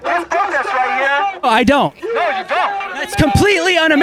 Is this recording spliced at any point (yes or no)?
no